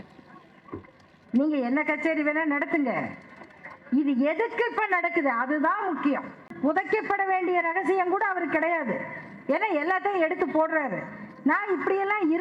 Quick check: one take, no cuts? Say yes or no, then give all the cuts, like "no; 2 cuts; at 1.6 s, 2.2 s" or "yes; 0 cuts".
no; 1 cut; at 6.4 s